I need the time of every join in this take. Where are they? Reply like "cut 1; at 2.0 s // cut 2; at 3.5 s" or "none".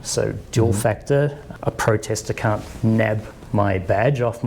cut 1; at 1.4 s

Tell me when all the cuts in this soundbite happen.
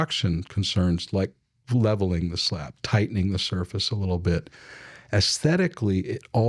none

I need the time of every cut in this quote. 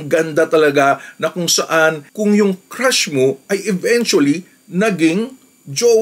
none

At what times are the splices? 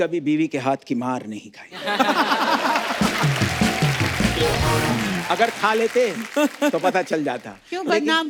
none

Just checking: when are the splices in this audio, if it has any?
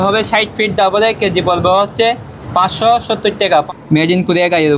cut 1; at 3.7 s

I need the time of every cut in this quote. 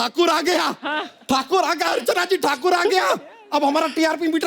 cut 1; at 1.1 s

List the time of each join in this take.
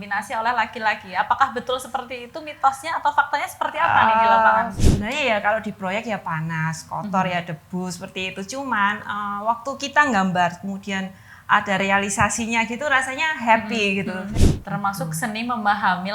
cut 1; at 4.7 s // cut 2; at 14.3 s

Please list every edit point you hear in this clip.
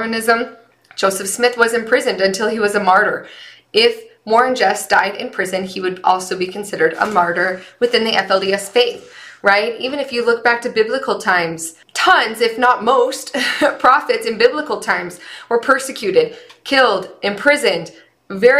none

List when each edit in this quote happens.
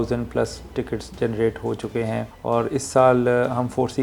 cut 1; at 2.3 s

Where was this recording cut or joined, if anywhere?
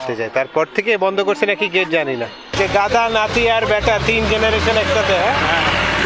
cut 1; at 2.4 s

